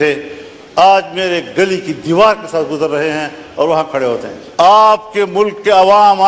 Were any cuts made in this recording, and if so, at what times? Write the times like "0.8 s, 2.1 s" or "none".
4.4 s